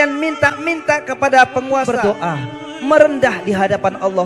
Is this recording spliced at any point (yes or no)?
yes